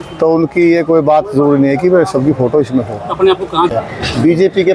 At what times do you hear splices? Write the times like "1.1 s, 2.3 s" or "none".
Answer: 3.7 s